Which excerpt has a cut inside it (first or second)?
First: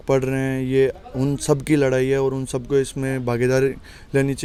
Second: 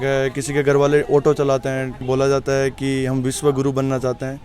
second